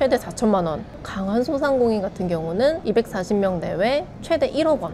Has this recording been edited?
no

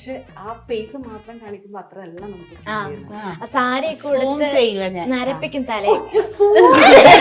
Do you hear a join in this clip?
no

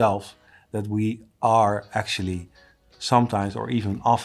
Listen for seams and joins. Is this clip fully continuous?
yes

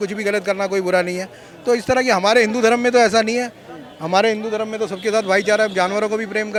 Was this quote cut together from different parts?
no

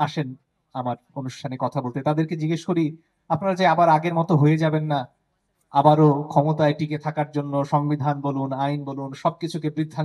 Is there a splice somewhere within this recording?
no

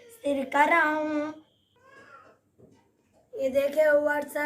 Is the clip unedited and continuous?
no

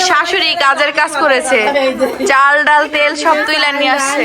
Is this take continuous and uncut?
yes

